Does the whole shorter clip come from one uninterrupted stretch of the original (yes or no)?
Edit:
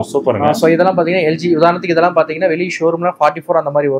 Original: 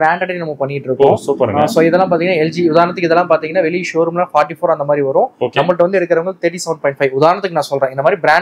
yes